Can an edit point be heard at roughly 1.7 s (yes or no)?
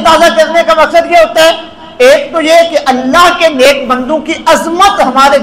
no